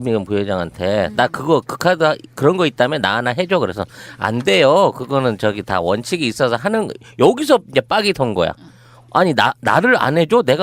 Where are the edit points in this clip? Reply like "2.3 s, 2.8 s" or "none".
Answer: 6.1 s